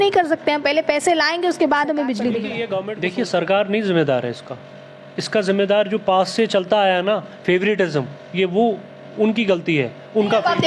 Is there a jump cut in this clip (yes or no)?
yes